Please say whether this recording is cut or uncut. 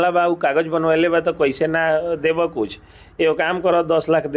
uncut